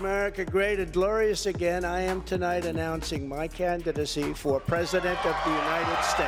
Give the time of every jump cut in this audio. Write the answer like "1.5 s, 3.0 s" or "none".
none